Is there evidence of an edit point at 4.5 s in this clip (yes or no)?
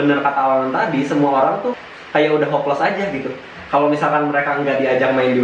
no